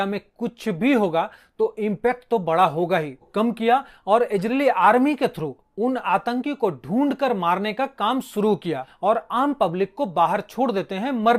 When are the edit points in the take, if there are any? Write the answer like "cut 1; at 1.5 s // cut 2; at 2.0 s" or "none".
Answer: cut 1; at 3.2 s // cut 2; at 8.9 s